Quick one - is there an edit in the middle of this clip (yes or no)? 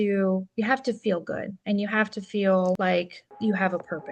yes